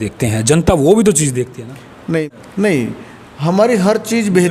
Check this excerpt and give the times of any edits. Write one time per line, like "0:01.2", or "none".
0:02.2